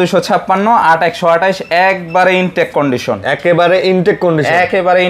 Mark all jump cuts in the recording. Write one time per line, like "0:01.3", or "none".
none